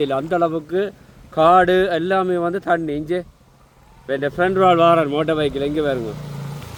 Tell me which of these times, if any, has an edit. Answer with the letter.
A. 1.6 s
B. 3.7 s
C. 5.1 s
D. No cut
D